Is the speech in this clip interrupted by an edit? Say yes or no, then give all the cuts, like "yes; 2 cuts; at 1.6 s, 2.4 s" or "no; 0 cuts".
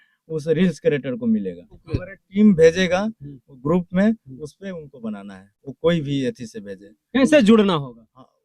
yes; 1 cut; at 1.7 s